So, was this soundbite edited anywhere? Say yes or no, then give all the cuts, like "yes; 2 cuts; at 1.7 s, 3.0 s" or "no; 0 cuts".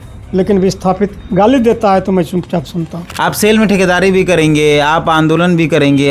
yes; 1 cut; at 3.0 s